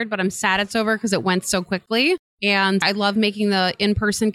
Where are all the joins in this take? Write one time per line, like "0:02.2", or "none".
none